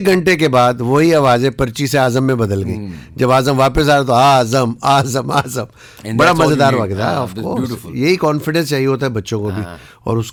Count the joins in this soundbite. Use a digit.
0